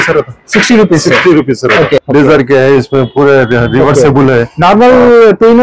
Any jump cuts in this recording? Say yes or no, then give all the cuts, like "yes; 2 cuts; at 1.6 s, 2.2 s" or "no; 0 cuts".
yes; 1 cut; at 2.0 s